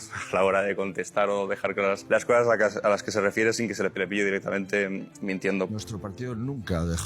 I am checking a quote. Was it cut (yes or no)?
yes